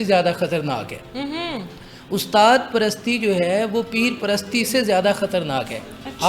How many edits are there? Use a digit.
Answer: 0